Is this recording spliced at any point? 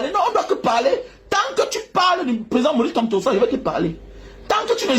no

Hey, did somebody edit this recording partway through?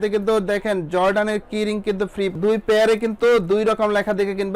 yes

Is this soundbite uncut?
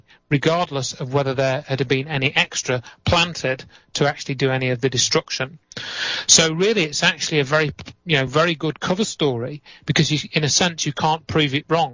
yes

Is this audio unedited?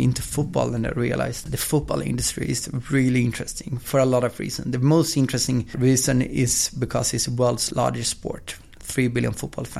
no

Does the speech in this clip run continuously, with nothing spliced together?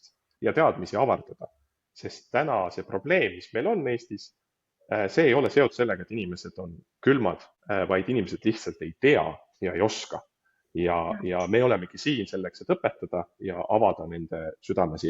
no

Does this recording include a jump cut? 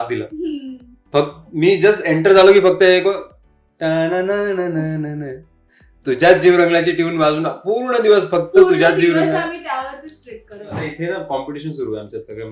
yes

